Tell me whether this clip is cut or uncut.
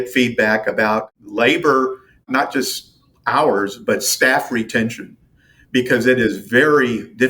cut